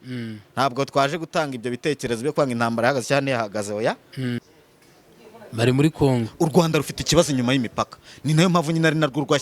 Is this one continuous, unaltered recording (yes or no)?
no